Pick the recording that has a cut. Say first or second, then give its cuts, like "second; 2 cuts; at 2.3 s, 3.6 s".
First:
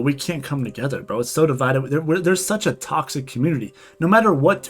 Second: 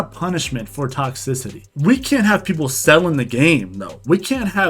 second; 1 cut; at 1.7 s